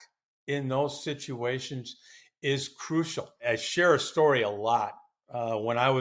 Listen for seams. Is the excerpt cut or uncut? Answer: cut